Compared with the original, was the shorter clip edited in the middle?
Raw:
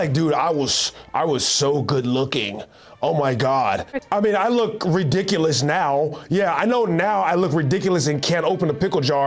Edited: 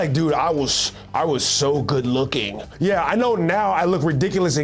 yes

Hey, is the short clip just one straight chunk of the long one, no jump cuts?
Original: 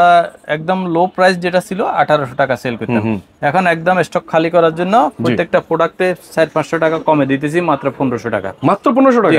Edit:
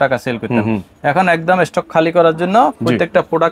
yes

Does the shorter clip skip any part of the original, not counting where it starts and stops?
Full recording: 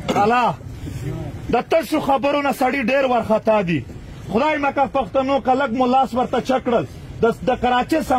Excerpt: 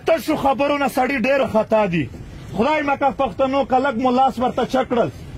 yes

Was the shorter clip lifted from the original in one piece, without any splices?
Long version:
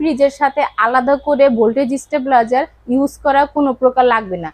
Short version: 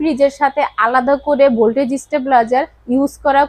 yes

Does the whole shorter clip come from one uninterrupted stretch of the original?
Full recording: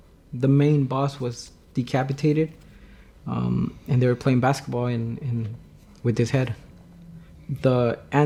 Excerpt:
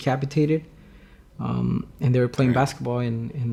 yes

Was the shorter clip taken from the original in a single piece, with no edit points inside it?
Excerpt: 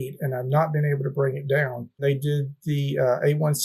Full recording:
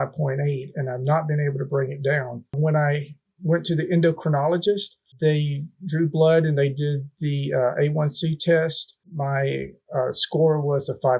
no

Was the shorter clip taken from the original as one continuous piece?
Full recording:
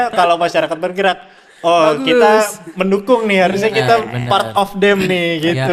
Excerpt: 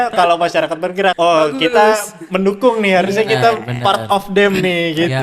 no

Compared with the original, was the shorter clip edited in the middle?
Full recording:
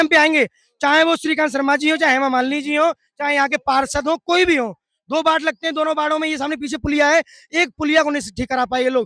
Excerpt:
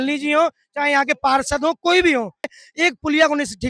yes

